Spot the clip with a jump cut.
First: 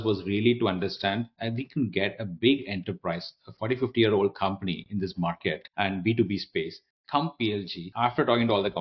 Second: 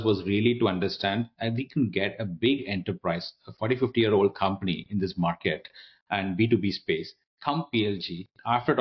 first; 2 cuts; at 5.6 s, 7.8 s

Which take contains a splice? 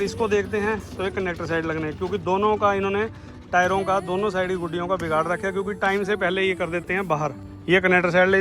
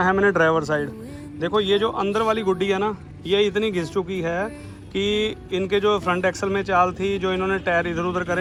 first; 1 cut; at 7.5 s

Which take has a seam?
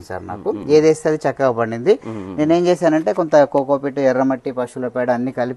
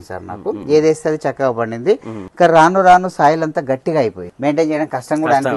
second; 2 cuts; at 2.2 s, 4.2 s

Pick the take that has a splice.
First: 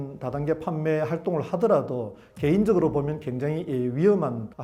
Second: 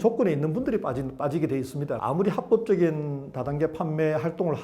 second; 1 cut; at 1.9 s

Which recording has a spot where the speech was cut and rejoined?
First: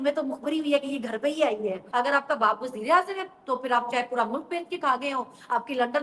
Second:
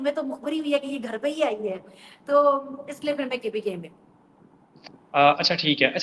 first; 1 cut; at 1.8 s

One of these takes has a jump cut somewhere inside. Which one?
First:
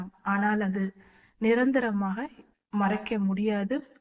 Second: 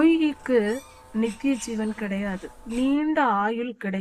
second; 2 cuts; at 0.9 s, 2.5 s

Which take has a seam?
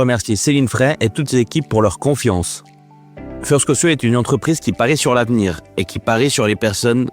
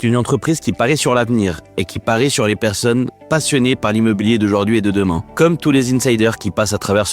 second; 1 cut; at 5.2 s

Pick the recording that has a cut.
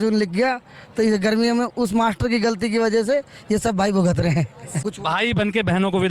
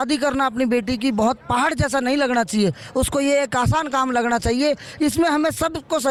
first; 1 cut; at 4.8 s

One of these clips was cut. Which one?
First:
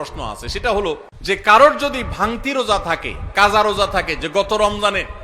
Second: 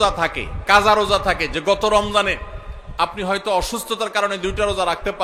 first; 1 cut; at 1.1 s

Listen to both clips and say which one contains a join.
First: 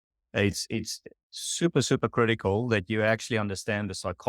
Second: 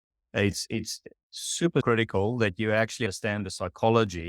second; 2 cuts; at 1.8 s, 3.1 s

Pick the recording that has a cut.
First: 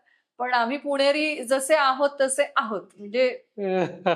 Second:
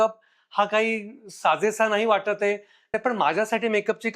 second; 1 cut; at 2.9 s

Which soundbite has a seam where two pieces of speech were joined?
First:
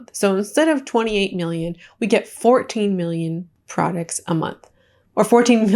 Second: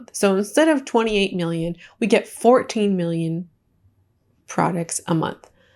first; 1 cut; at 3.6 s

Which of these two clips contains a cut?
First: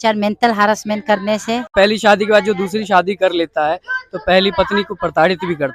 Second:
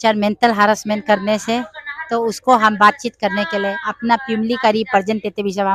first; 1 cut; at 1.7 s

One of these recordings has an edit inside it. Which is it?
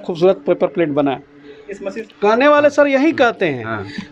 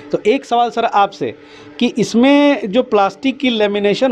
first; 1 cut; at 2.0 s

